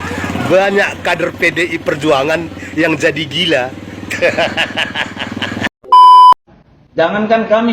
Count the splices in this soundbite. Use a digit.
2